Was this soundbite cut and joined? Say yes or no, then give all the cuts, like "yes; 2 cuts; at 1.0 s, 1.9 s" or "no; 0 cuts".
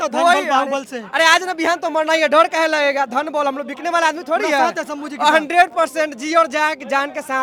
no; 0 cuts